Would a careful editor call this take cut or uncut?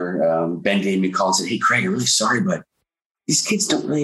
uncut